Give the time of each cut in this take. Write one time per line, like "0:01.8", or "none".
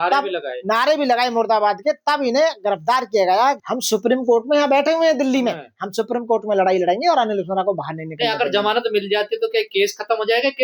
0:03.6